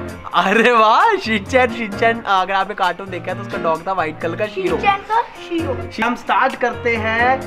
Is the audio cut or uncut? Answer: cut